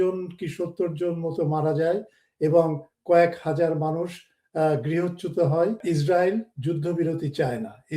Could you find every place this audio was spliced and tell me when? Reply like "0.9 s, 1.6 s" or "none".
5.8 s